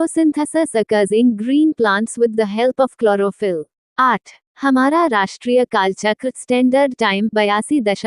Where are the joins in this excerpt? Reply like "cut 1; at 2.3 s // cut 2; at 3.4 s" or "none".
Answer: cut 1; at 3.9 s